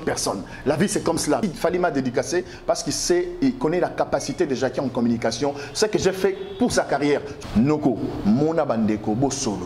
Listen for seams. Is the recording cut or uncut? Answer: cut